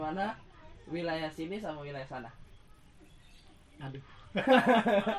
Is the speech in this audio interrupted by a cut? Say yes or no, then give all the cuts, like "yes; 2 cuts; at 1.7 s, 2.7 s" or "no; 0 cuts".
no; 0 cuts